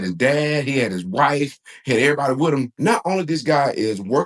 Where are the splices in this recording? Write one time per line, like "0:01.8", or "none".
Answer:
0:02.7